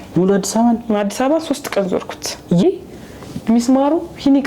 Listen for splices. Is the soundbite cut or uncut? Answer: cut